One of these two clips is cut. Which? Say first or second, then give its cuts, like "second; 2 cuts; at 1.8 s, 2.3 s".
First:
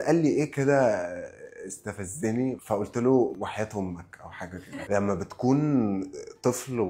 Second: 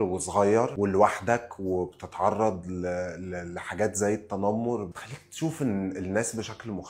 first; 2 cuts; at 3.4 s, 4.8 s